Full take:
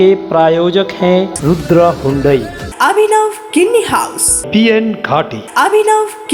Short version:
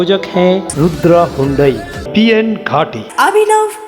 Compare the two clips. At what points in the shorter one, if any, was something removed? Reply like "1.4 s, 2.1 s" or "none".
1.9 s